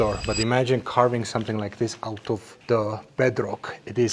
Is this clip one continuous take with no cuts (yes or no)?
no